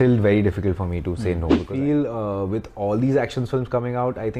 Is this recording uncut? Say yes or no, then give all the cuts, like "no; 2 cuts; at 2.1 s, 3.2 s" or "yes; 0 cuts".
no; 1 cut; at 1.6 s